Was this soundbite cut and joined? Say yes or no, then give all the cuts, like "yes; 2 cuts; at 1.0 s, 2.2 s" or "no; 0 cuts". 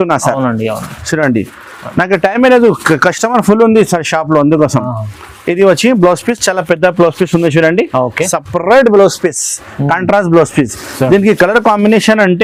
no; 0 cuts